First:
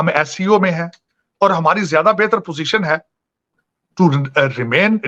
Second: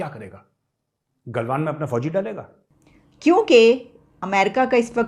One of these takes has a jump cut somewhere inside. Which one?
second; 1 cut; at 2.9 s

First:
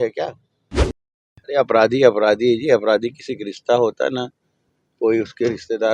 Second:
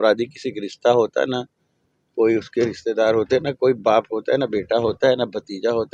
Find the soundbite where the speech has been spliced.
first; 1 cut; at 1.0 s

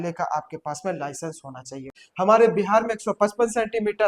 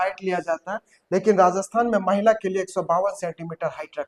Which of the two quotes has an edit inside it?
first; 1 cut; at 2.0 s

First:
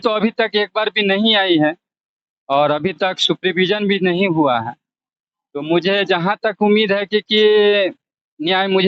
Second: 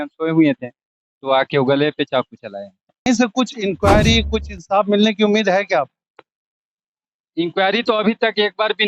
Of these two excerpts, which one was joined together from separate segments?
second; 1 cut; at 3.1 s

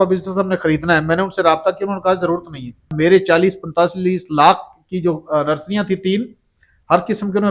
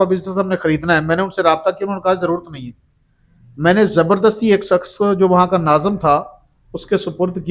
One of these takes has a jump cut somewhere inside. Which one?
first; 1 cut; at 2.9 s

